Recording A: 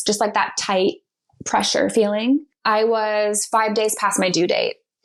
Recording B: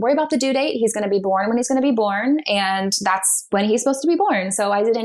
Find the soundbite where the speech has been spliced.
A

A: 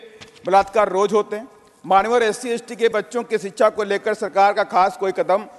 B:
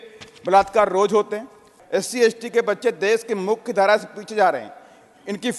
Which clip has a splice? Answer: B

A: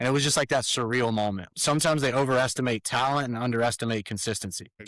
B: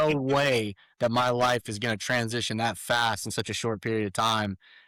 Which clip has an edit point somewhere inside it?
A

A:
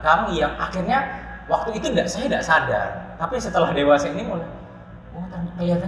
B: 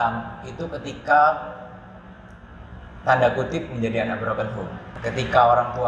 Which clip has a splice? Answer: B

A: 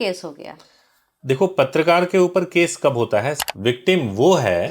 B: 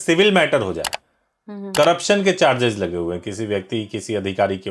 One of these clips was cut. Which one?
A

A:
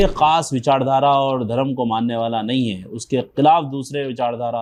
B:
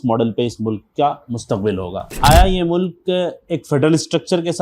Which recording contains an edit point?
B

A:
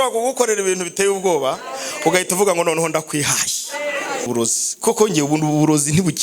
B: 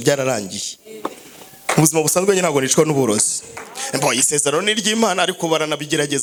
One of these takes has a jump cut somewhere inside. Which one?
A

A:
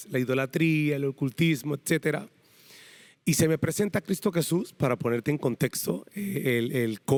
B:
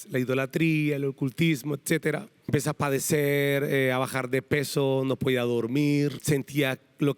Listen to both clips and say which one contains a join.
B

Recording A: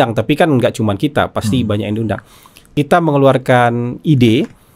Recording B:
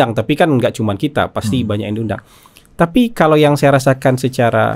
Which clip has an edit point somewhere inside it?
A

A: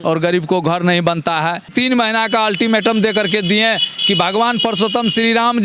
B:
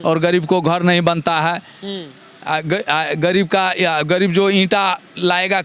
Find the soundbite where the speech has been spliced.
A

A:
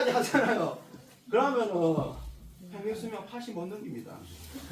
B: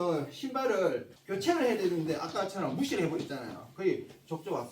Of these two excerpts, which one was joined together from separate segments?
B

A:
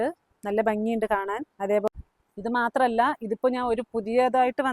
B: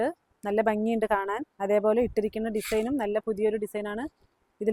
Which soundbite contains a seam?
A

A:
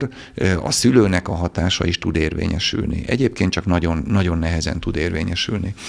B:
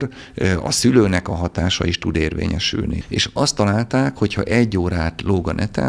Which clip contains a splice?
B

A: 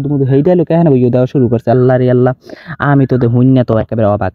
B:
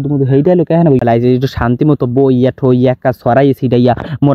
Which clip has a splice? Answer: B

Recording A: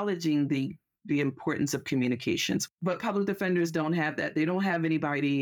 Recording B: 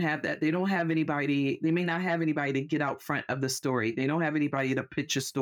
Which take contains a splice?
A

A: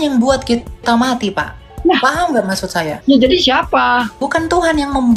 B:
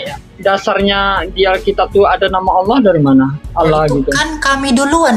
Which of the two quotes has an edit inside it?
A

